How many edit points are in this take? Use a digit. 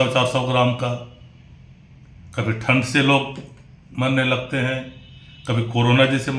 0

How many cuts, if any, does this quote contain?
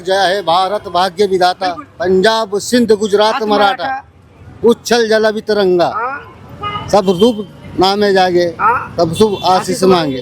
0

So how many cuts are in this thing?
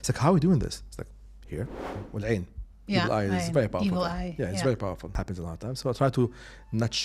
2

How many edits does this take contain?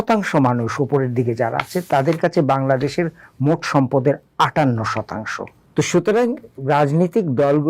1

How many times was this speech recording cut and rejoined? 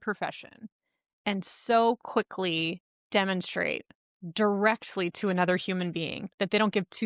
1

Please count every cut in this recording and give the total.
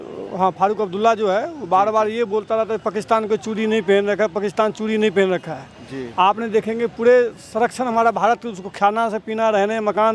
0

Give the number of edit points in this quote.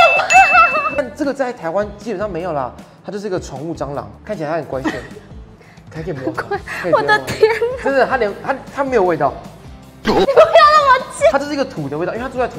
1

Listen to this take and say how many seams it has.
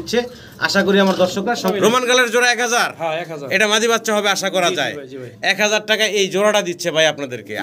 1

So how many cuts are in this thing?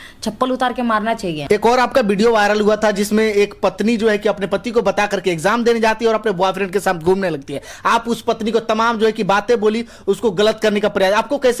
1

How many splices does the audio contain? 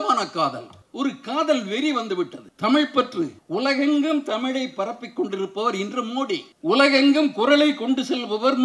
0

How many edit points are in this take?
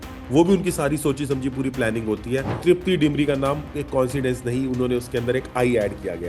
1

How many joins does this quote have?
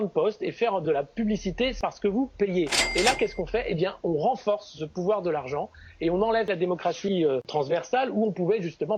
4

